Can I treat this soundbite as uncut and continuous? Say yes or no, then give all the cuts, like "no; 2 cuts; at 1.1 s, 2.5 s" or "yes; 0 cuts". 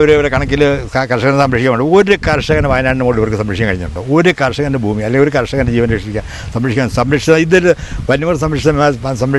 yes; 0 cuts